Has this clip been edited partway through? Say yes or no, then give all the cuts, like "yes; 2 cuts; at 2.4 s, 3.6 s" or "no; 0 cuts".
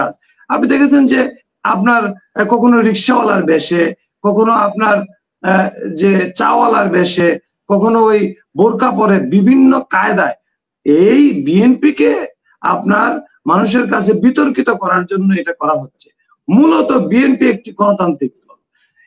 no; 0 cuts